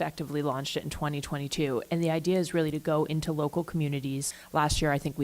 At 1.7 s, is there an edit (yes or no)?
no